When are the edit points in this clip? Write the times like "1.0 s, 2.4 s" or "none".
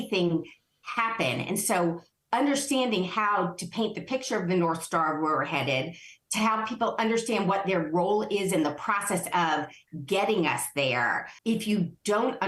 11.3 s